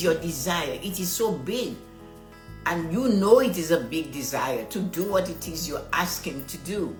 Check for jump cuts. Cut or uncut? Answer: uncut